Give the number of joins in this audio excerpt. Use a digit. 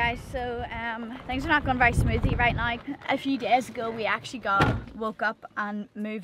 2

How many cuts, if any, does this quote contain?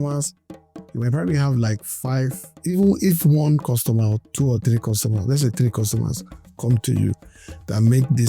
1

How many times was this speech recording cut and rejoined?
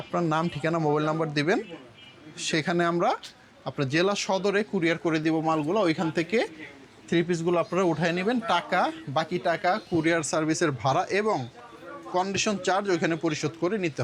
0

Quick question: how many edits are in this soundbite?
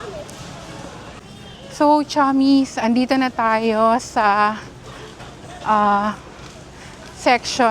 1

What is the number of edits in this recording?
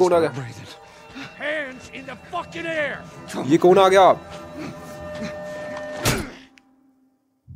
0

